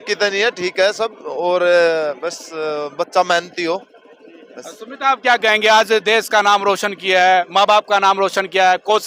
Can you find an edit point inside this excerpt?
no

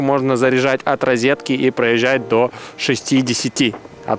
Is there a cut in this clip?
no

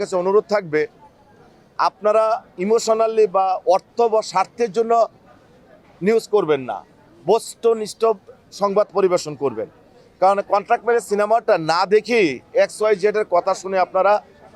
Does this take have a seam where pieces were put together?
no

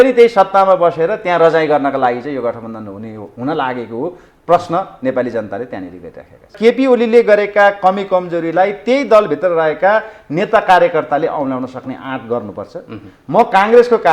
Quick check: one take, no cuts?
no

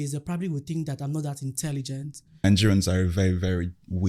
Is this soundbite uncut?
no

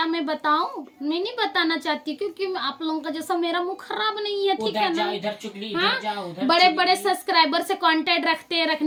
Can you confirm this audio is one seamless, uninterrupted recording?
yes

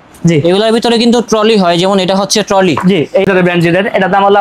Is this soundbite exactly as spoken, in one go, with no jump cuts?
no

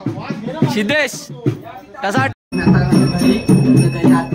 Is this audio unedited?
no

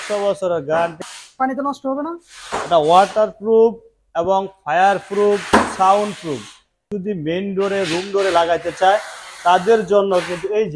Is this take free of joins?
no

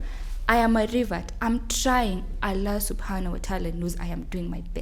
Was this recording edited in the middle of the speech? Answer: no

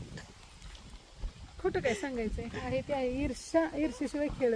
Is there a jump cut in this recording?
no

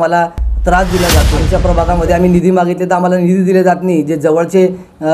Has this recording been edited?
yes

